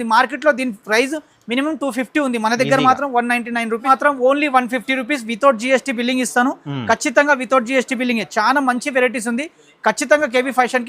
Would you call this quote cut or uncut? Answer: cut